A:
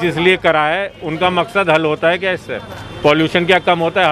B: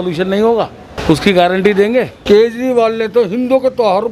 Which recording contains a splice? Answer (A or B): B